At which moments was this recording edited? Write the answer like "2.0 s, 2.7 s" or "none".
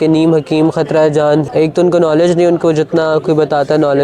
1.5 s